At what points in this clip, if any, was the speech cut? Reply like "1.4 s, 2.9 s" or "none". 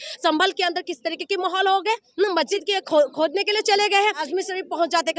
2.5 s, 4.2 s